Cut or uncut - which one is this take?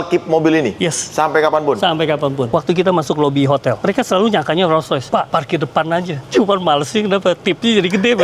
cut